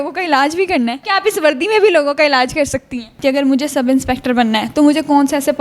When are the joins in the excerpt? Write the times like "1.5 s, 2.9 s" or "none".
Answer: 3.1 s